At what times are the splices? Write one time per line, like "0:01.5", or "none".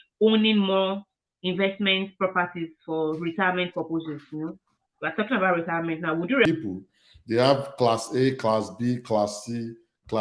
0:06.4